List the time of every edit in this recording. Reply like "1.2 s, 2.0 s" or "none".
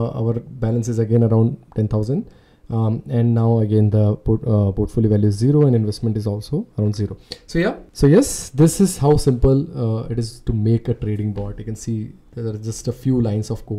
none